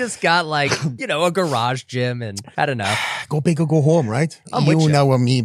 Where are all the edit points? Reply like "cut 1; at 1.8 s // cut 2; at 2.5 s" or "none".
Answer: cut 1; at 0.9 s // cut 2; at 2.4 s // cut 3; at 4.4 s